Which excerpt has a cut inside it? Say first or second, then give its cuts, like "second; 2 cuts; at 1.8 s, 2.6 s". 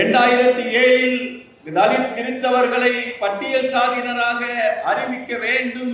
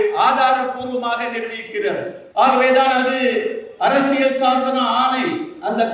second; 1 cut; at 2.2 s